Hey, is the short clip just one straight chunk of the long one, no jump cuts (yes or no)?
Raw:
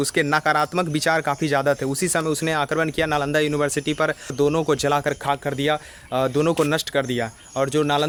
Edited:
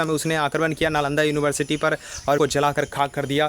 no